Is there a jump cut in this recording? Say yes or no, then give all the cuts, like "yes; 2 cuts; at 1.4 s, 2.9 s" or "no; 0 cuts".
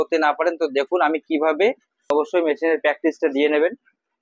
yes; 1 cut; at 2.1 s